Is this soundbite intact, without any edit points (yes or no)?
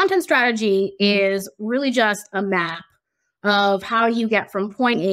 yes